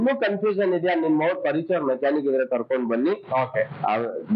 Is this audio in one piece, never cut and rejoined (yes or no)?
yes